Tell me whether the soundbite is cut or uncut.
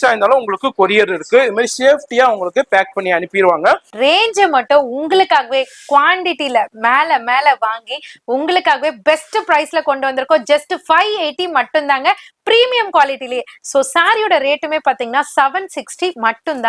cut